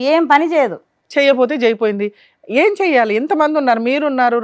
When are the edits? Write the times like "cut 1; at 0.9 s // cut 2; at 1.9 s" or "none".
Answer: none